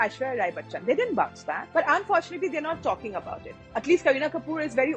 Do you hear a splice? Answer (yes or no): no